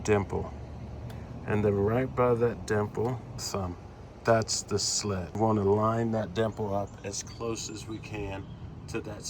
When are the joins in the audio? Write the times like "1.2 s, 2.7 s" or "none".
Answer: 3.5 s, 5.3 s